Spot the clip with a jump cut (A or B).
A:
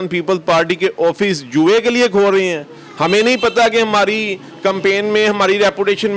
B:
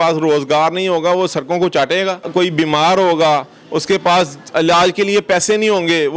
B